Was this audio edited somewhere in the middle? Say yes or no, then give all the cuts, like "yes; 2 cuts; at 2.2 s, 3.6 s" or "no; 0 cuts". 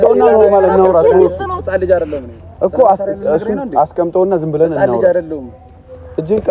no; 0 cuts